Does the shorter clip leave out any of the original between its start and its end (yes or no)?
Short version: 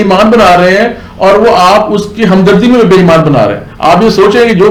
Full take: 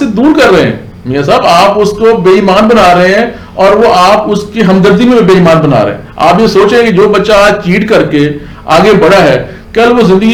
no